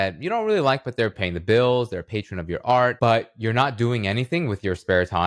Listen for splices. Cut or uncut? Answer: cut